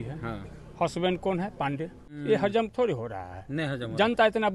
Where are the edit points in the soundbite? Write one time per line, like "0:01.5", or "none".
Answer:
0:02.1